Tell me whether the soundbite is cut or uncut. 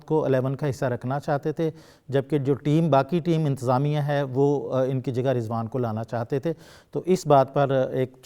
uncut